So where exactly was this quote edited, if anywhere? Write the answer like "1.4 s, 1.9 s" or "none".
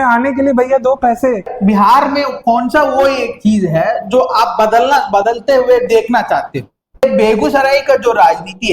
1.5 s, 7.0 s